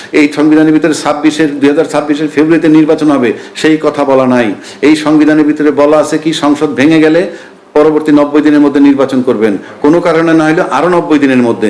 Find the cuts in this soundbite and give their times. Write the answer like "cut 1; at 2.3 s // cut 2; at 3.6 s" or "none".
none